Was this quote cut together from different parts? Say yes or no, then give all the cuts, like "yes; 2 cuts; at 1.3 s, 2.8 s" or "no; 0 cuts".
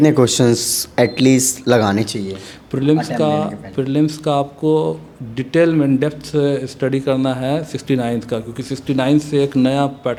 no; 0 cuts